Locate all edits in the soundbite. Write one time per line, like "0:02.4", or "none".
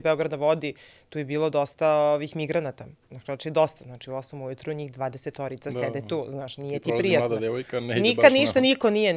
none